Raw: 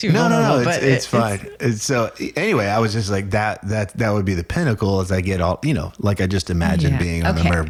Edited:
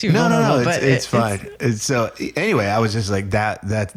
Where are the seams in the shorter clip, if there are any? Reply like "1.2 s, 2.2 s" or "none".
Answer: none